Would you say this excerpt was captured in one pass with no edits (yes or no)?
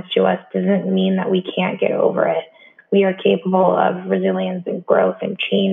yes